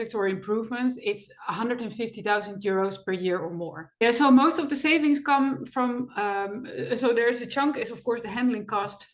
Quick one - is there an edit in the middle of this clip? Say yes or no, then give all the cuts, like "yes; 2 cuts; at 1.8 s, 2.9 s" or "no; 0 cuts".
yes; 1 cut; at 4.0 s